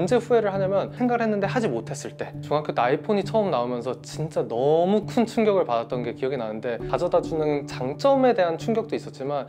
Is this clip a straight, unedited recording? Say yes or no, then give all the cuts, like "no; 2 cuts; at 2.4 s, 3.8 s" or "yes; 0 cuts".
yes; 0 cuts